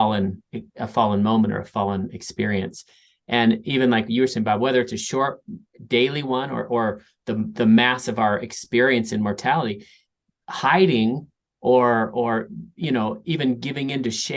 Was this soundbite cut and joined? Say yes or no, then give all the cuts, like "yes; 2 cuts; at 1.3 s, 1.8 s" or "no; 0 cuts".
no; 0 cuts